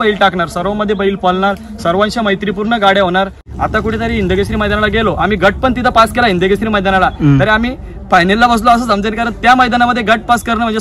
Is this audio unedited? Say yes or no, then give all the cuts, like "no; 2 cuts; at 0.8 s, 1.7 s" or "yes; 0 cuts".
no; 1 cut; at 3.4 s